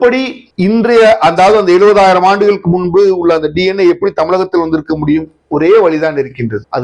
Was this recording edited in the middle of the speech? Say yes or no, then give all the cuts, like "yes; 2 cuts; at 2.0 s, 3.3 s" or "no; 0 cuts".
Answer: no; 0 cuts